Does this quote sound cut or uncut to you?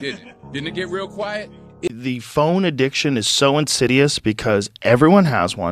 cut